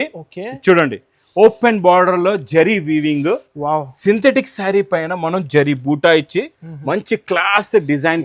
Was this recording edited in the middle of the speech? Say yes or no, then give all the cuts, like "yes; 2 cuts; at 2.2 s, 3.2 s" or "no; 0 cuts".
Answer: no; 0 cuts